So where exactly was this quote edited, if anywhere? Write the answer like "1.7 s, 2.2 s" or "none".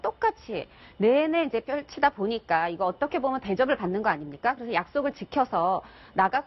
none

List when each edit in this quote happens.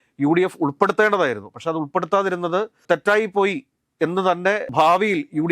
2.8 s

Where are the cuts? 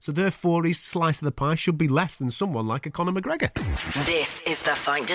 3.8 s

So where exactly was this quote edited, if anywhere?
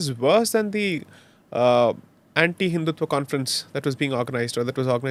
none

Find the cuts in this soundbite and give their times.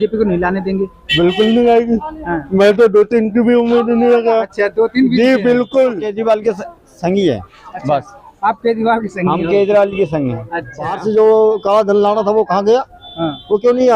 6.1 s, 11.0 s

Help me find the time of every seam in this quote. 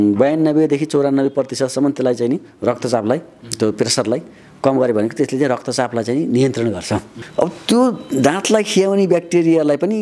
7.2 s

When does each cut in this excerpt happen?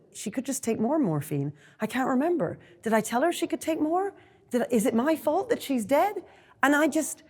none

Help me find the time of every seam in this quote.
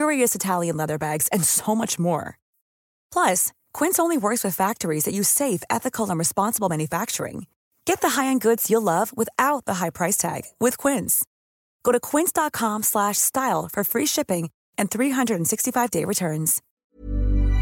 16.6 s

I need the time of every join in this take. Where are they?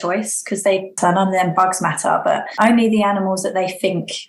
0.9 s, 2.5 s

